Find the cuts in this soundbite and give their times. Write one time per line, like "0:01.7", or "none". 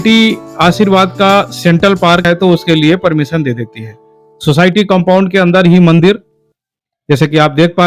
0:02.2